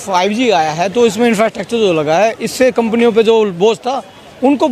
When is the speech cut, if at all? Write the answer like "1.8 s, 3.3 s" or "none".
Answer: none